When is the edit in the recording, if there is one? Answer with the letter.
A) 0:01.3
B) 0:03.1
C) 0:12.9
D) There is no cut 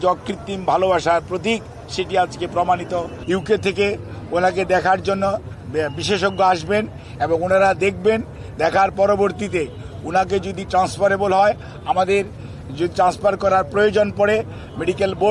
B